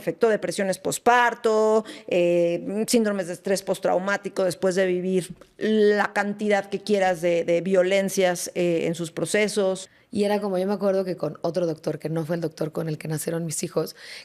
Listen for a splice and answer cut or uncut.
cut